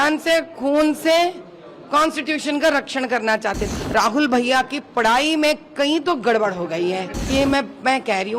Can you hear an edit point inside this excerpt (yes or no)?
yes